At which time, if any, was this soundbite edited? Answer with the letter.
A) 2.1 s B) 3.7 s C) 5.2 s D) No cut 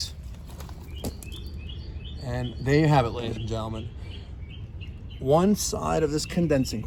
D